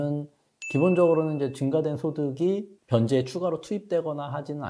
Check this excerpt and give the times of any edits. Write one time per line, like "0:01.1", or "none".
none